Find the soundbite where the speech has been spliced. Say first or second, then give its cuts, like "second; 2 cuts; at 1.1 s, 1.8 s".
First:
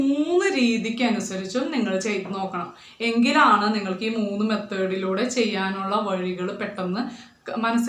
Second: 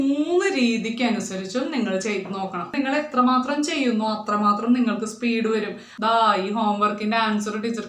second; 2 cuts; at 2.8 s, 5.8 s